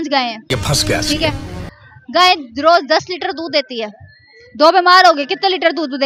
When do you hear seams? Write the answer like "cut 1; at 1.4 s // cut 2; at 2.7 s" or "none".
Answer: none